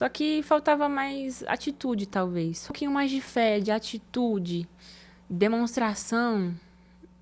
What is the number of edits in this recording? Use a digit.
0